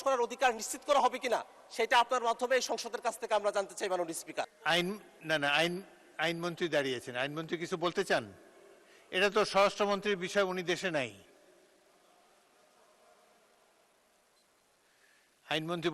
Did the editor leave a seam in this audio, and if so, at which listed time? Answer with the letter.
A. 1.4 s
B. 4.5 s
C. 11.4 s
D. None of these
B